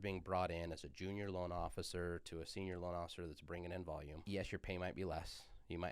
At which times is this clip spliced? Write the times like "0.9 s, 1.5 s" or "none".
4.1 s